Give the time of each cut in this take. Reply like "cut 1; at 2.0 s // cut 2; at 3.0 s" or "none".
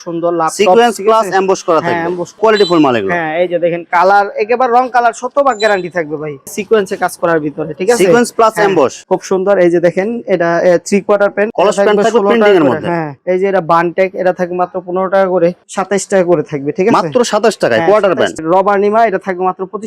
cut 1; at 2.4 s // cut 2; at 6.5 s // cut 3; at 9.0 s // cut 4; at 11.5 s // cut 5; at 15.6 s // cut 6; at 18.4 s